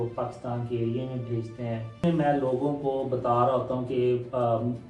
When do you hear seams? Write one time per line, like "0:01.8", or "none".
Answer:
0:02.0